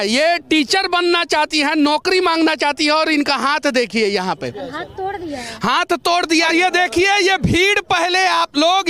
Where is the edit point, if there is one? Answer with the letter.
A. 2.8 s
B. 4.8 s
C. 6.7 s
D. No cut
D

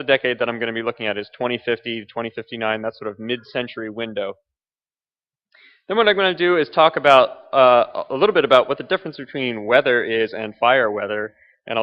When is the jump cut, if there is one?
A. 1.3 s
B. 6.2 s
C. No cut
B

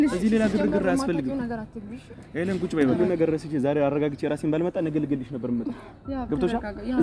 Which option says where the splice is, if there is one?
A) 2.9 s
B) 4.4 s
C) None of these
A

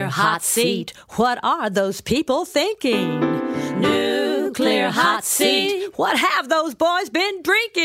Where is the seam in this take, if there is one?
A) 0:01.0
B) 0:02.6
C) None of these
C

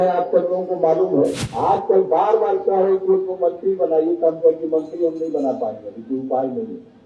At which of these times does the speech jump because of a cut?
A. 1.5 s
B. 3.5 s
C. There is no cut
A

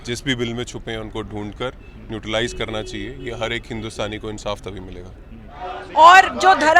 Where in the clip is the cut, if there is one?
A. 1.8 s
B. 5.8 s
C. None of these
B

